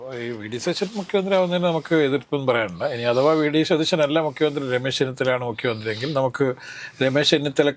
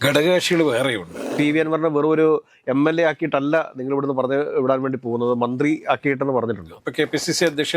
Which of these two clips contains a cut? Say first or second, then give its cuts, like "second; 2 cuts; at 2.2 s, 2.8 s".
second; 2 cuts; at 1.3 s, 6.8 s